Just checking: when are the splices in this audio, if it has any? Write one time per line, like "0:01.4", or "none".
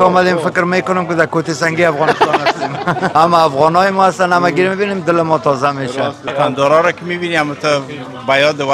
0:03.1
0:06.3